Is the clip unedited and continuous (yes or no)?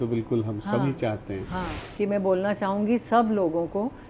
no